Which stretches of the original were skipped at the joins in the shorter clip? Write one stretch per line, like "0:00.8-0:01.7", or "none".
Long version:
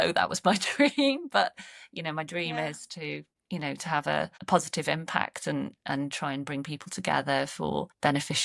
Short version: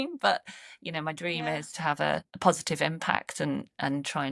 0:02.8-0:03.8